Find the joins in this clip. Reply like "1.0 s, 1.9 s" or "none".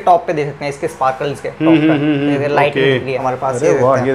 3.2 s

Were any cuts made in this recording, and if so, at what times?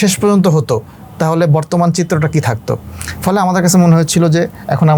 none

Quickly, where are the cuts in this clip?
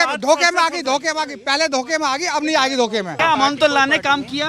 3.1 s

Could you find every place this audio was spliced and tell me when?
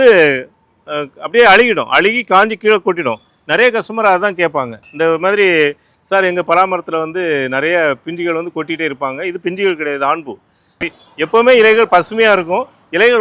10.7 s

